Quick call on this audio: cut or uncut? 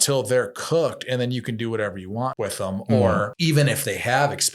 cut